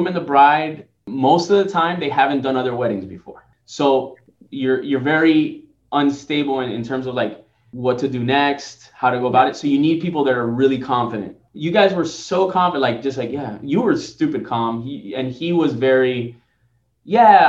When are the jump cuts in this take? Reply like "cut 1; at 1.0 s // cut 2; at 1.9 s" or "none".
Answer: none